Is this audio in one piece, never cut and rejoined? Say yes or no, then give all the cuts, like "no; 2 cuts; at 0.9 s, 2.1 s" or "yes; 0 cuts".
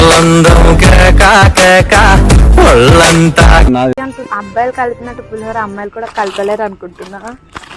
no; 1 cut; at 3.9 s